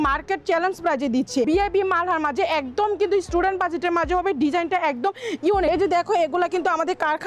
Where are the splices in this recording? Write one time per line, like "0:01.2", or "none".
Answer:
0:01.5
0:05.7

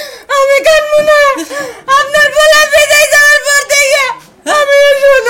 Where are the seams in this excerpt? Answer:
none

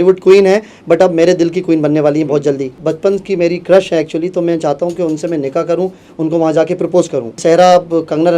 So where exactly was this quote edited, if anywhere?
0:02.8
0:07.4

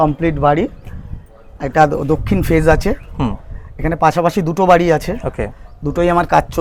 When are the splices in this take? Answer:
none

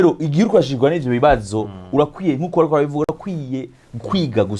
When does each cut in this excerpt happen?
none

